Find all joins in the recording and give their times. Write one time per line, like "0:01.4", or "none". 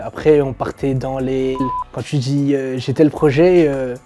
0:01.6